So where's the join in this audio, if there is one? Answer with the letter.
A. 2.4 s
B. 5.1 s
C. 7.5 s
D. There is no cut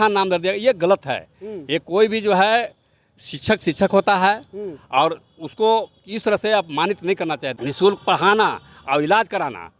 C